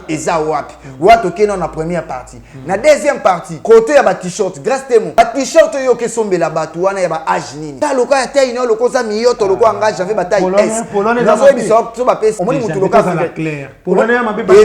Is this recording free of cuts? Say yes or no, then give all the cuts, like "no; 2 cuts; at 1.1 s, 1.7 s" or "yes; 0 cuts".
no; 4 cuts; at 3.5 s, 5.2 s, 7.6 s, 12.4 s